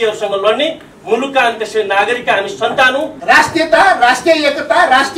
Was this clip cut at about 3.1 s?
yes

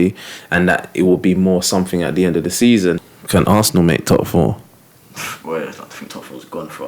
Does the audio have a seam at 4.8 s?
no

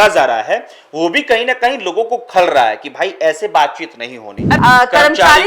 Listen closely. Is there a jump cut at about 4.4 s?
yes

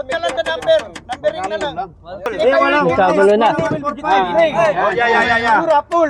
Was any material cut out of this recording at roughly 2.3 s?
yes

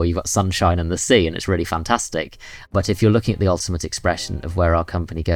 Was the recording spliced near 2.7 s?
yes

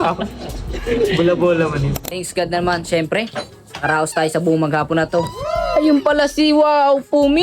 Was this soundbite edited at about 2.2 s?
yes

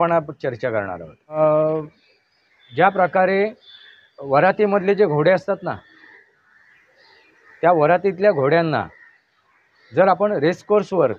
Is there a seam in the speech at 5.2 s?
no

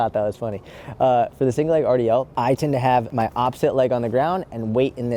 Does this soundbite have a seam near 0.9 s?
no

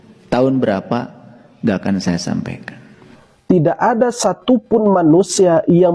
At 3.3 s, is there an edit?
yes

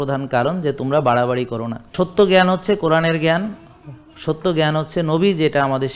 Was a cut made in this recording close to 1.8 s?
yes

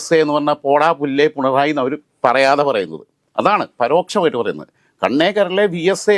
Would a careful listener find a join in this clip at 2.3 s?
no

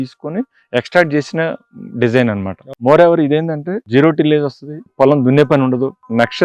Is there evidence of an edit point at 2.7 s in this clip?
yes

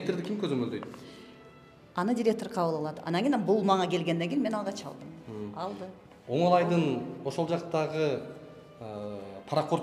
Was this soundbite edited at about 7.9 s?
no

